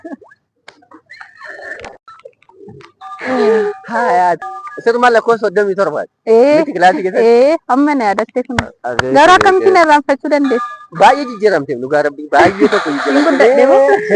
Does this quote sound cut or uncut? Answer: cut